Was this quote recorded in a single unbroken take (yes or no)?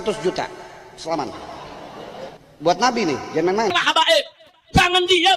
no